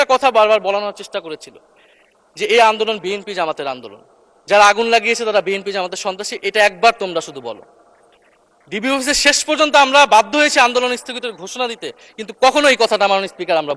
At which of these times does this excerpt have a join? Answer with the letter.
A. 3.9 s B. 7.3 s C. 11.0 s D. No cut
D